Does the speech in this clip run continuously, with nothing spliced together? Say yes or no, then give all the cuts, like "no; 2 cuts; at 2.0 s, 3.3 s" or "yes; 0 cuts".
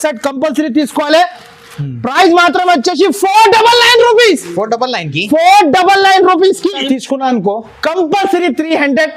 no; 1 cut; at 6.8 s